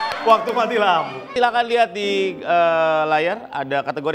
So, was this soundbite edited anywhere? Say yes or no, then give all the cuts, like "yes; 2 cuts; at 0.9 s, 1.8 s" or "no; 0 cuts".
yes; 1 cut; at 1.3 s